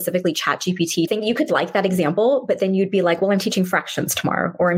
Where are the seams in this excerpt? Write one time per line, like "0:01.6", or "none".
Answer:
0:01.1